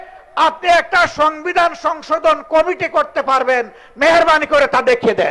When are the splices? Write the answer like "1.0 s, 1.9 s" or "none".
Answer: none

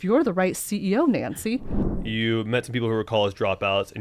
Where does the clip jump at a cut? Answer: 1.9 s

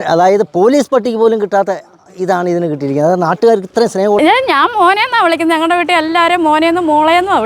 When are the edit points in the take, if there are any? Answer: 4.2 s

